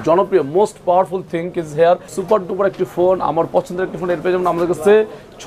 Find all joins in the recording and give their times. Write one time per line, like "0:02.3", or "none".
0:02.1